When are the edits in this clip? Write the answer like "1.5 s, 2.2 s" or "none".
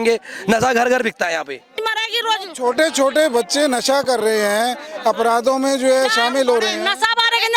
1.8 s